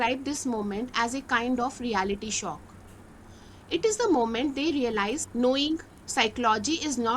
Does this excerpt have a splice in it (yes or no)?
yes